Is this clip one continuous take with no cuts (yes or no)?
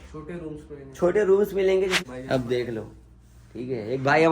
no